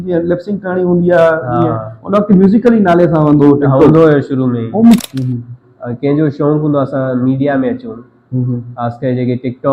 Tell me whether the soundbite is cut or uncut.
cut